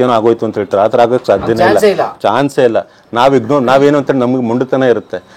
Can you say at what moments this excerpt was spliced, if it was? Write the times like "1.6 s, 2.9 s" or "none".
none